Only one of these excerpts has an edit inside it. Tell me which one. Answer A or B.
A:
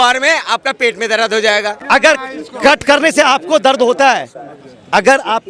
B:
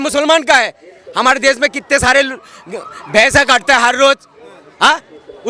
A